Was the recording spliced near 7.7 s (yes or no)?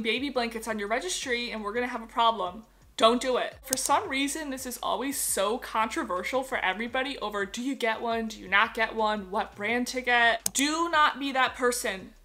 no